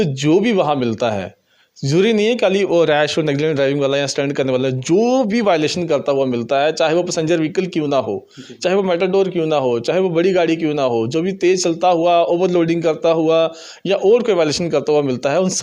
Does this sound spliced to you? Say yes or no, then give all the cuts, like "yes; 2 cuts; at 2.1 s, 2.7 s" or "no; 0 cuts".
no; 0 cuts